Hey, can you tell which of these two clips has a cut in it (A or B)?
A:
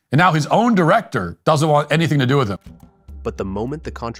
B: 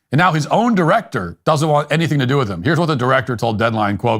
B